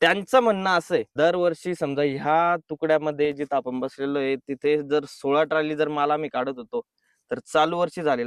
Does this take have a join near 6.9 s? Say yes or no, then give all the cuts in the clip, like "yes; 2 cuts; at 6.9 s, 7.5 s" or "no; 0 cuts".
no; 1 cut; at 1.1 s